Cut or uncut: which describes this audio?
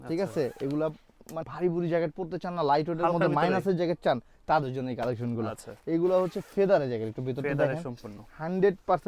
cut